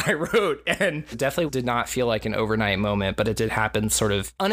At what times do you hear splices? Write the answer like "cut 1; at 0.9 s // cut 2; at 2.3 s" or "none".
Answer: cut 1; at 1.4 s